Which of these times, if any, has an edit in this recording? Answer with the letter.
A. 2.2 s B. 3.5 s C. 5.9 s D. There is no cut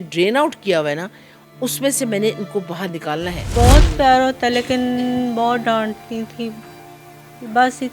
B